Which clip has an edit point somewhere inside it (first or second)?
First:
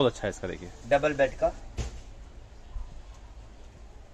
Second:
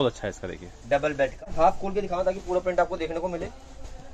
second